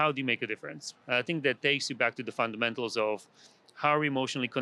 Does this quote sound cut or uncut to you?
uncut